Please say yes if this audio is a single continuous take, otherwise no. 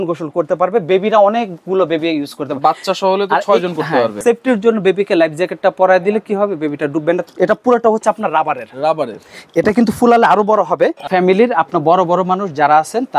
no